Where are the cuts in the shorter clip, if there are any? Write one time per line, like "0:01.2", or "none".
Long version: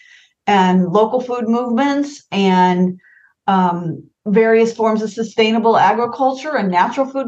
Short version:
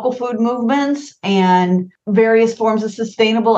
0:01.9